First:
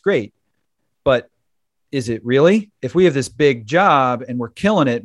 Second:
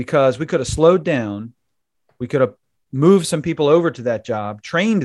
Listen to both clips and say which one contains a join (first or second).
first